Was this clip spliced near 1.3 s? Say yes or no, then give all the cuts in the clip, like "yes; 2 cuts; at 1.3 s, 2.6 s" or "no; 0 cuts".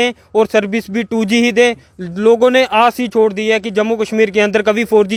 no; 0 cuts